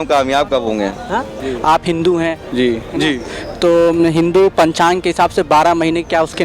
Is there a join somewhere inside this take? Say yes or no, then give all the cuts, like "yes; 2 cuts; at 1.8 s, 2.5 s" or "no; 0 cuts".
yes; 1 cut; at 1.4 s